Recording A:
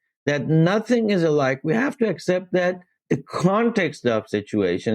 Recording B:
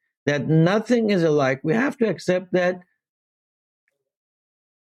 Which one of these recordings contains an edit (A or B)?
A